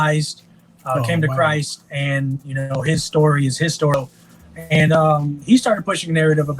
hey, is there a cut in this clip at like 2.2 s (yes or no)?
no